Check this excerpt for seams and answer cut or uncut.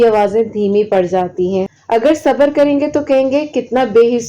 cut